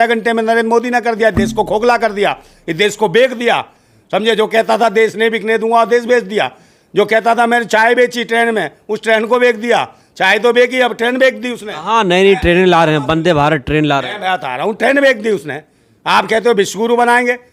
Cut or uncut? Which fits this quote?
uncut